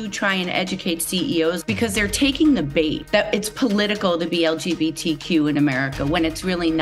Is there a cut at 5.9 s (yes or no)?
no